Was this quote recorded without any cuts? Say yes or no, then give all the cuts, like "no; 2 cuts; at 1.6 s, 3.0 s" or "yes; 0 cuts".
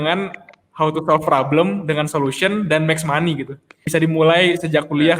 no; 1 cut; at 3.8 s